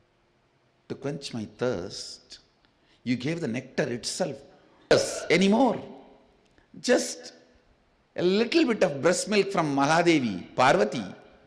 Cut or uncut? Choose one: cut